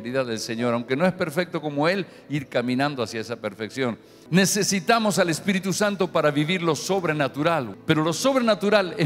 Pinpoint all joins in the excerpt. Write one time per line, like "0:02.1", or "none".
0:04.1
0:07.7

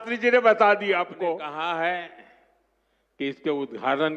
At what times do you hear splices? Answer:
0:01.4

